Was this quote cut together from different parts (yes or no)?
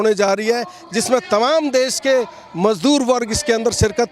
no